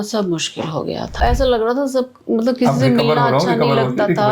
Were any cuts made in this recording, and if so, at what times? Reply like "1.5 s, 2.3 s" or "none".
1.2 s

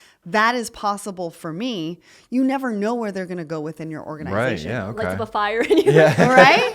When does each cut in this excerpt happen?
4.2 s

